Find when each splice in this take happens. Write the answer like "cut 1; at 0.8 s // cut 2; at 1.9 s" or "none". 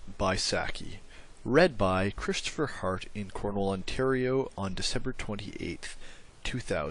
none